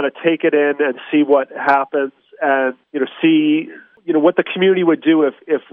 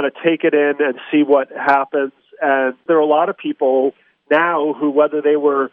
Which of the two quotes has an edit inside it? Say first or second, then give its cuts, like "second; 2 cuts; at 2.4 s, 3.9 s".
second; 1 cut; at 2.8 s